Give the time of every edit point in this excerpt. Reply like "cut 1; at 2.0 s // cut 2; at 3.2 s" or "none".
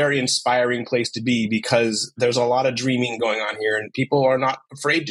cut 1; at 2.1 s